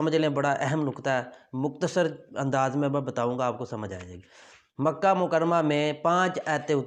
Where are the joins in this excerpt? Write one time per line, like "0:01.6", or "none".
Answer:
none